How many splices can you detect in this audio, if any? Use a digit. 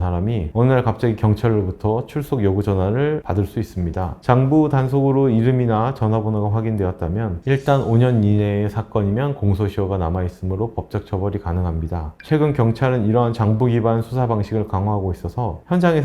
2